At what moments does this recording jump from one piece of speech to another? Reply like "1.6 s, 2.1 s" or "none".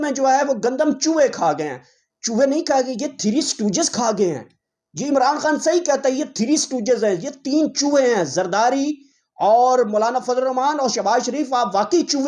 none